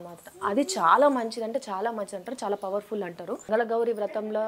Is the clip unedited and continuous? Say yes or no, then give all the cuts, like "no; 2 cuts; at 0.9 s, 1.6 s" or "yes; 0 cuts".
no; 1 cut; at 3.5 s